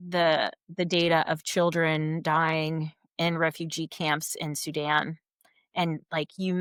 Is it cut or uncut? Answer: uncut